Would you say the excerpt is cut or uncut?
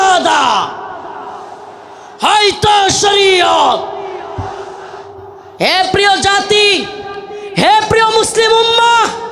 cut